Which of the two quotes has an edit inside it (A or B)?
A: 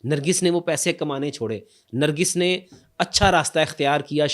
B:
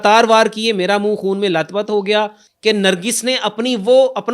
B